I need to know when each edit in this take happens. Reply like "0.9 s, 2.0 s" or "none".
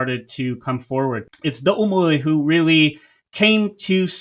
1.3 s